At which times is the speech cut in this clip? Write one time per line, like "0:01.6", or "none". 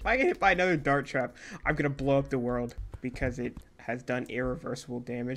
0:02.8